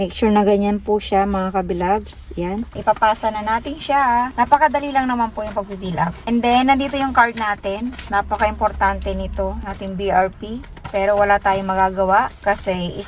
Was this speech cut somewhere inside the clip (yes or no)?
no